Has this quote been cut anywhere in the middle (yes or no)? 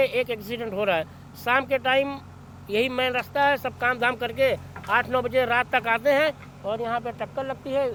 no